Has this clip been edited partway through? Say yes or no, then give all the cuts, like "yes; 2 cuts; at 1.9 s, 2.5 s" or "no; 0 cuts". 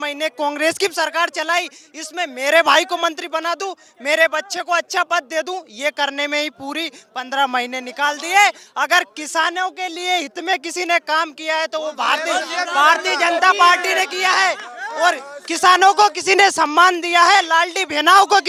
no; 0 cuts